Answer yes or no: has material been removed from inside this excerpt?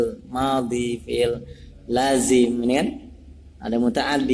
no